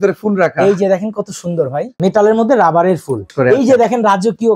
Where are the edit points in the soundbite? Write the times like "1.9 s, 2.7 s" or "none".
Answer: 1.8 s, 3.3 s